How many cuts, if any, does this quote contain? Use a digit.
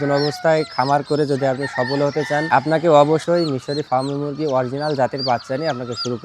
2